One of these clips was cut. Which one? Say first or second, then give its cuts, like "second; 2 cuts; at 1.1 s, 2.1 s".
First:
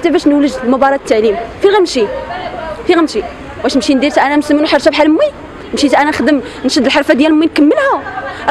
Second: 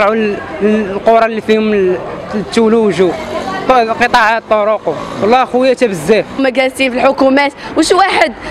second; 1 cut; at 6.4 s